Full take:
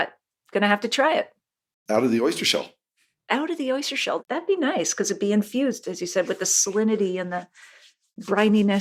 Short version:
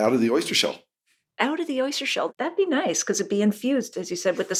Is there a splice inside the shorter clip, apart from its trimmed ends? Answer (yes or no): no